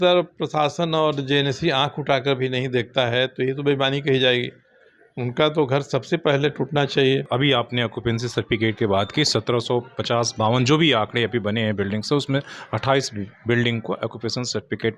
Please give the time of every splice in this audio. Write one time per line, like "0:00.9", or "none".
0:07.3